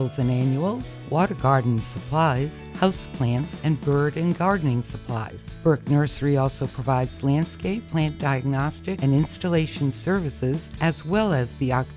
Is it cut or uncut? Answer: uncut